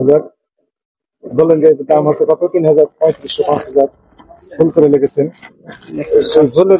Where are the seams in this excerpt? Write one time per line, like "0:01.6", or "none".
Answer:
none